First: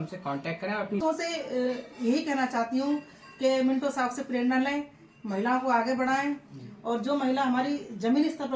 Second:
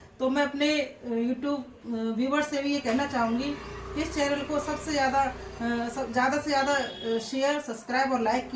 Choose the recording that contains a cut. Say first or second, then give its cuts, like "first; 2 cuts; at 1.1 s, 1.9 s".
first; 1 cut; at 1.0 s